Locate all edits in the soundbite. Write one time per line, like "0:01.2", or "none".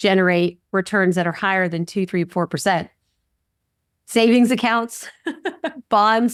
none